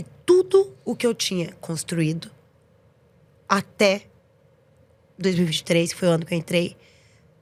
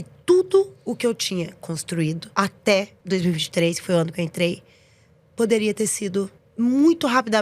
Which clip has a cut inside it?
second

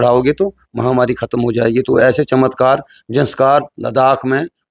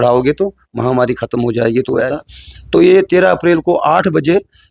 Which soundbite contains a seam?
second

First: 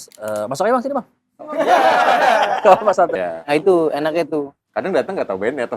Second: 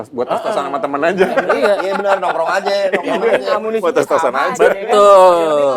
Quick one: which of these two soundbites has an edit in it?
first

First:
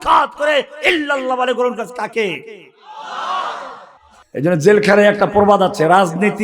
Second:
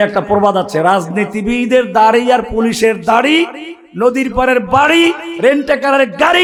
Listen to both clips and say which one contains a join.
first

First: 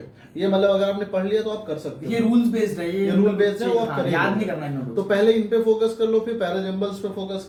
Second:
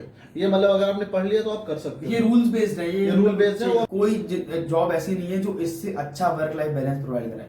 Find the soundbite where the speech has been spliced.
second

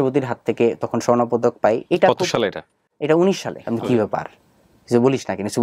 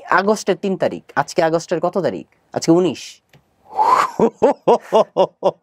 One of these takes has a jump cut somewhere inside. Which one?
first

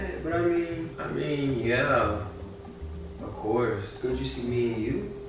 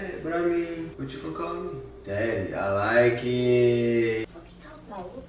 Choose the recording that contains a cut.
second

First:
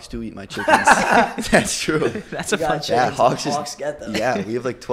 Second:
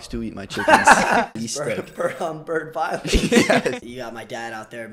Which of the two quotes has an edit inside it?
second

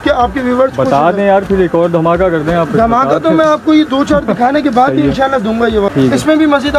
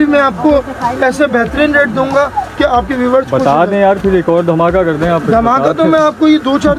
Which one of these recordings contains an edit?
first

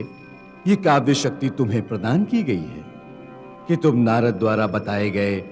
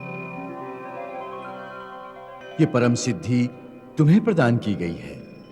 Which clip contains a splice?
second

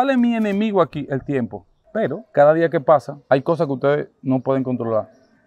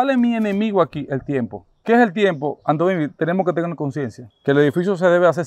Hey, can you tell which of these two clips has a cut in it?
first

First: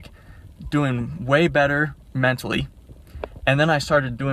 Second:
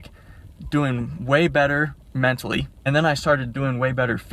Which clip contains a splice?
second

